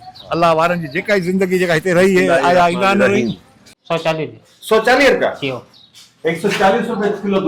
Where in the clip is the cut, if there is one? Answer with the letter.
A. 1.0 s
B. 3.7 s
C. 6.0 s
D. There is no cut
B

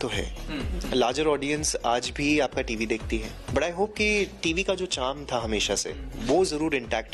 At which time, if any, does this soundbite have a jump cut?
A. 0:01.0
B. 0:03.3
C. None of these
B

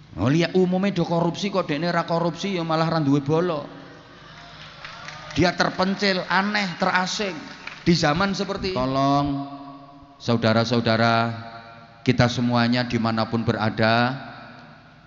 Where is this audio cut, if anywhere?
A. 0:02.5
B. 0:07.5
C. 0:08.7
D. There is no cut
C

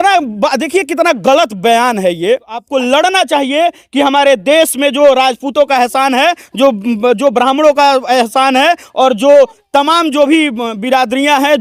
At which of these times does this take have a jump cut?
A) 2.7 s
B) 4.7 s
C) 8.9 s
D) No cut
A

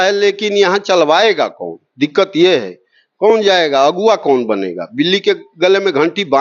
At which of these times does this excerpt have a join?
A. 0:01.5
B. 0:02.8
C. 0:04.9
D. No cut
D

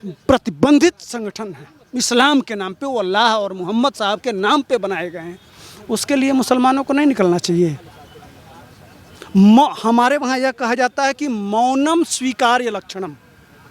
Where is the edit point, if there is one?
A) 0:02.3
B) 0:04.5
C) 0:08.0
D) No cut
D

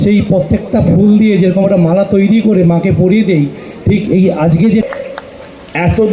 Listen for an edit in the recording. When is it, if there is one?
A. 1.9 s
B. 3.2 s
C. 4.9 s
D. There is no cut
C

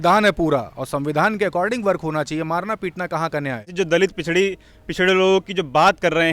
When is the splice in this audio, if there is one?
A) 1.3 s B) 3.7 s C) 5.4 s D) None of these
B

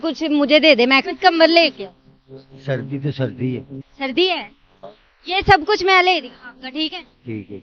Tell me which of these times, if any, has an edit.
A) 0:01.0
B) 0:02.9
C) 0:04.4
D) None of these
A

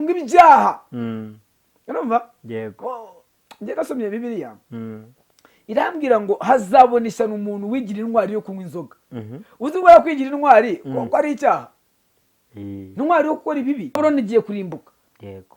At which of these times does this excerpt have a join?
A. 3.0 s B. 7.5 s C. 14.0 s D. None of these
C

